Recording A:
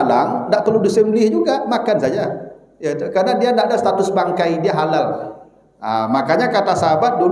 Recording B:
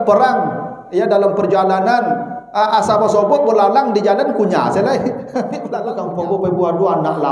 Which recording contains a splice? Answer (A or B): B